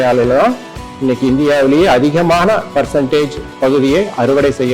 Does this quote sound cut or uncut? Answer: cut